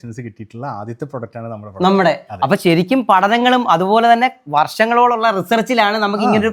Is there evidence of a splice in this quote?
no; 0 cuts

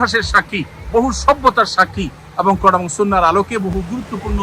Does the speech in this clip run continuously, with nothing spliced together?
yes; 0 cuts

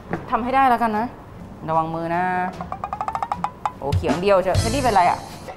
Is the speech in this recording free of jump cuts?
yes; 0 cuts

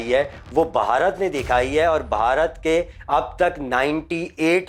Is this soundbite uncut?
yes; 0 cuts

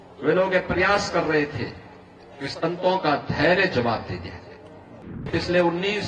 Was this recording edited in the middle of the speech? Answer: yes; 1 cut; at 4.9 s

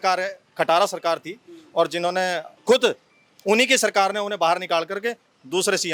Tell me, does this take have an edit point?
no; 0 cuts

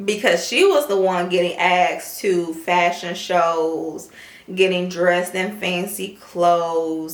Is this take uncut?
yes; 0 cuts

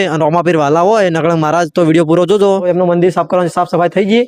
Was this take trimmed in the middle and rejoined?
yes; 1 cut; at 2.6 s

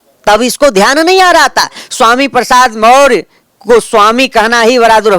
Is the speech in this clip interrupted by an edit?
yes; 1 cut; at 1.8 s

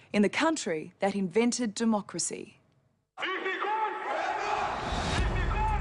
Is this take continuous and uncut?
no; 1 cut; at 1.9 s

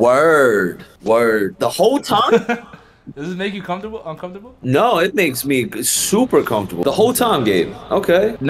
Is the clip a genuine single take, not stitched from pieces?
yes; 0 cuts

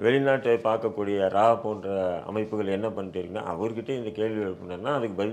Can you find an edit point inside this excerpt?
no; 0 cuts

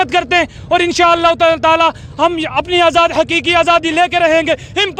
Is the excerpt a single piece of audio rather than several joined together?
yes; 0 cuts

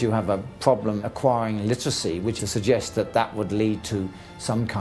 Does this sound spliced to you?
no; 0 cuts

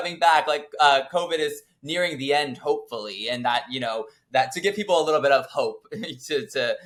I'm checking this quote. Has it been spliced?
no; 0 cuts

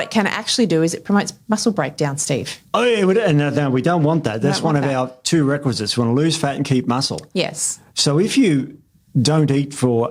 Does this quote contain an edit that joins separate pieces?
no; 0 cuts

